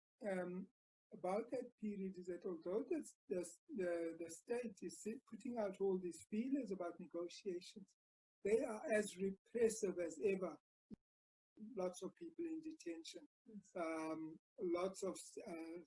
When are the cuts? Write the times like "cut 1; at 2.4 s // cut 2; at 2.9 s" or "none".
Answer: cut 1; at 11.2 s